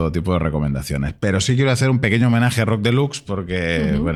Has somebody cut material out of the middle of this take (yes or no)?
no